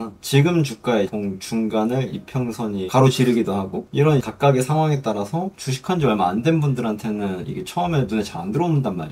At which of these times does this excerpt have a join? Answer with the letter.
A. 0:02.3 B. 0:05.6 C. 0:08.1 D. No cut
B